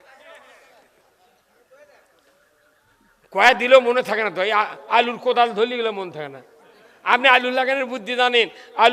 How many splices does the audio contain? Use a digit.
0